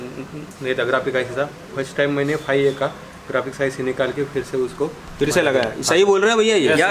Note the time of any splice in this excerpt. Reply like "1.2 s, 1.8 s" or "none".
none